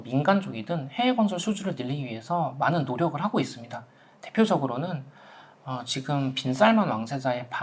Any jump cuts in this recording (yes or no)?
no